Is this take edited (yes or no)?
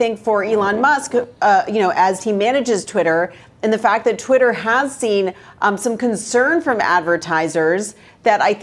no